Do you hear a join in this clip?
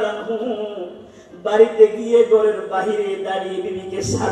no; 0 cuts

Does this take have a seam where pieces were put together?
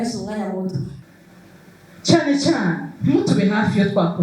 yes; 1 cut; at 1.0 s

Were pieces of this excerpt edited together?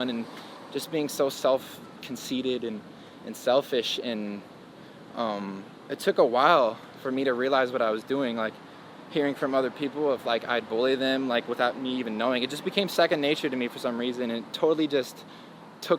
no; 0 cuts

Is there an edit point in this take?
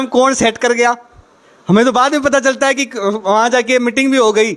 no; 0 cuts

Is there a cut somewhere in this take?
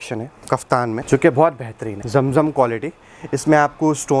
yes; 2 cuts; at 1.0 s, 1.9 s

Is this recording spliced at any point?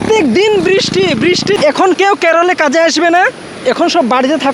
yes; 1 cut; at 1.9 s

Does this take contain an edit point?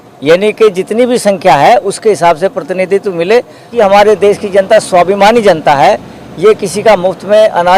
yes; 1 cut; at 3.7 s

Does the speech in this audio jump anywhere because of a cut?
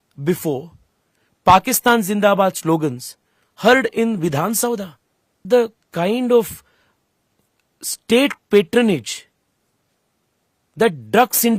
yes; 1 cut; at 5.4 s

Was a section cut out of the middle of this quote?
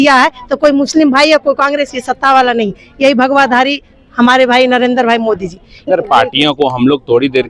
yes; 1 cut; at 5.8 s

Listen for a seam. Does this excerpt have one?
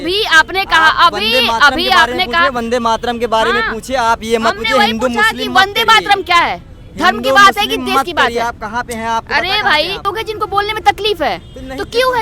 yes; 1 cut; at 10.0 s

